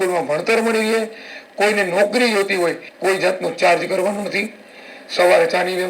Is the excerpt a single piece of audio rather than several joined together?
no; 1 cut; at 2.9 s

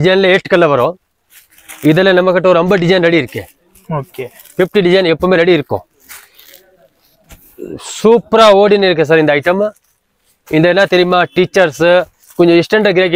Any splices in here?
no; 0 cuts

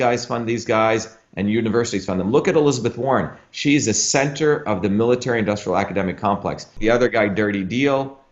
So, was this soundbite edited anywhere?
yes; 1 cut; at 6.7 s

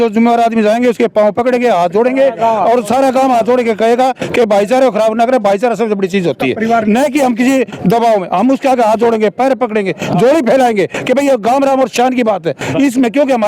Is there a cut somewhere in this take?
no; 0 cuts

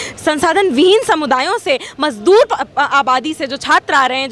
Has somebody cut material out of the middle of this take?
no; 0 cuts

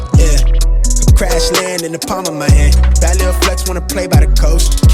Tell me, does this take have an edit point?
no; 0 cuts

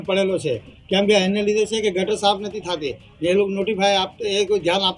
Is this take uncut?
yes; 0 cuts

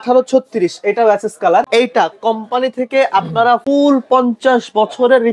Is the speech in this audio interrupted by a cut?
yes; 2 cuts; at 1.7 s, 3.6 s

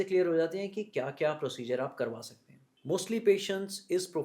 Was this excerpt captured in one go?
no; 1 cut; at 2.3 s

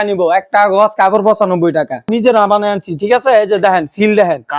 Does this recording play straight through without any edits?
no; 1 cut; at 2.1 s

